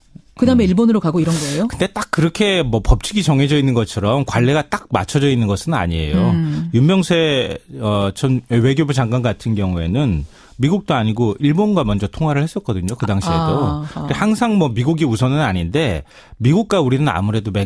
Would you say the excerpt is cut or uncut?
uncut